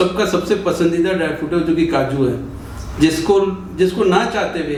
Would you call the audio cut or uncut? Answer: uncut